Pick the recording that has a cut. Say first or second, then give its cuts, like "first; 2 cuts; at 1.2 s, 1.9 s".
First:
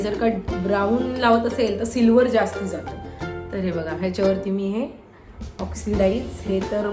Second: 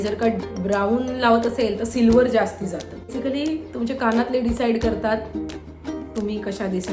second; 1 cut; at 3.1 s